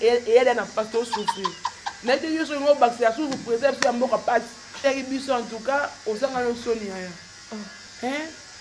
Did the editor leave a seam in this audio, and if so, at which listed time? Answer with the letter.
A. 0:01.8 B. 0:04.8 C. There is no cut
B